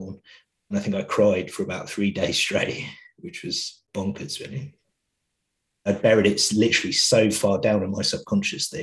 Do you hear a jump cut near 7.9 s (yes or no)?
no